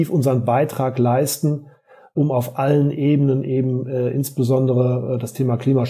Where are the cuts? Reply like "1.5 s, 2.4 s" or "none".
none